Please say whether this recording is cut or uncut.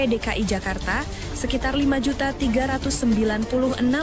uncut